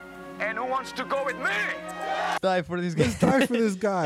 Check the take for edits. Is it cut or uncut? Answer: cut